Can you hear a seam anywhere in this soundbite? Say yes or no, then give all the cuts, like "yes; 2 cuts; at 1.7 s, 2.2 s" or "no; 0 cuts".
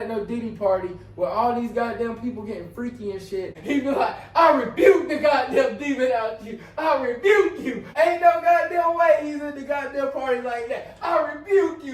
yes; 2 cuts; at 3.6 s, 7.8 s